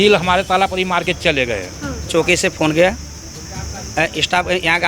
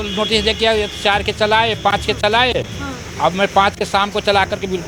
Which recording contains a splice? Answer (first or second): first